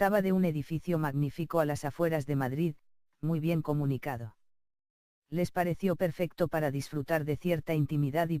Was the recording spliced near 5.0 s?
yes; 1 cut; at 5.0 s

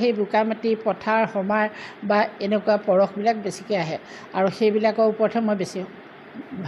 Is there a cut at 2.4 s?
no; 0 cuts

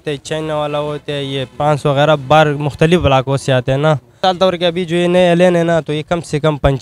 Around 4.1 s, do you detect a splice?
yes; 1 cut; at 4.1 s

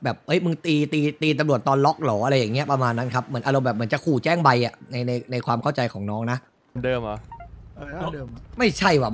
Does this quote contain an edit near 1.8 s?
no; 1 cut; at 6.8 s

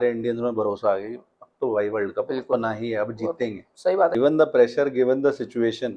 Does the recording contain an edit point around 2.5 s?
no; 1 cut; at 4.1 s

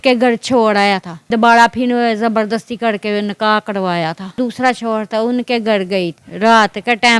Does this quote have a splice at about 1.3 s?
yes; 3 cuts; at 1.3 s, 4.4 s, 6.2 s

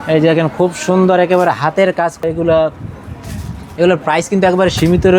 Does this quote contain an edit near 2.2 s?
yes; 1 cut; at 2.2 s

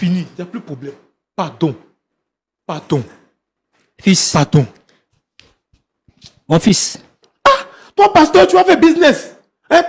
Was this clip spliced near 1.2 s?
no; 1 cut; at 7.2 s

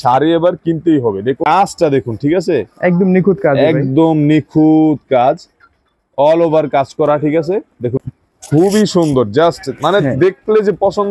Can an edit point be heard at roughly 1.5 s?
yes; 2 cuts; at 1.5 s, 8.0 s

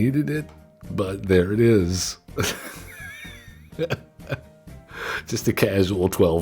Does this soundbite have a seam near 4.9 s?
yes; 1 cut; at 4.9 s

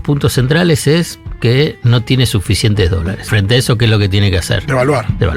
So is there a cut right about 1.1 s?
no; 1 cut; at 3.2 s

